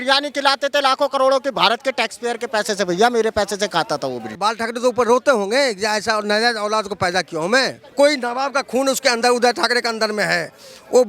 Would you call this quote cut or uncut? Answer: cut